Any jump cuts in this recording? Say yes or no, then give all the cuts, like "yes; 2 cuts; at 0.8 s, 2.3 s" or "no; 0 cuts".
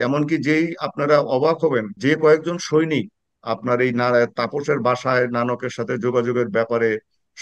yes; 1 cut; at 1.9 s